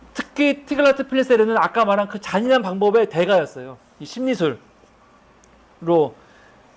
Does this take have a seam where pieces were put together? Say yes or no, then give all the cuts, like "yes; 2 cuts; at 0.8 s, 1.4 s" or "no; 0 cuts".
yes; 1 cut; at 2.7 s